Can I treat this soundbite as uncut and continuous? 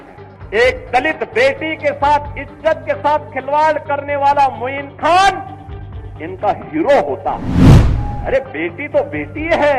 yes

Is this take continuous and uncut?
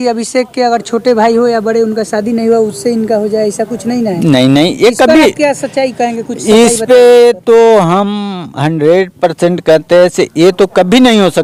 yes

